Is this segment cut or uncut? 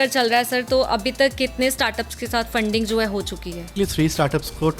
cut